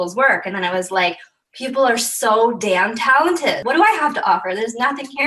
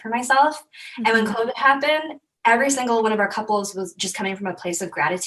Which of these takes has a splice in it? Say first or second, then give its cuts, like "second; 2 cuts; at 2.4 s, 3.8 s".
first; 1 cut; at 3.6 s